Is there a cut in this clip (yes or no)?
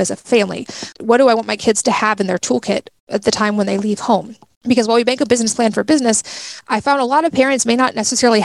no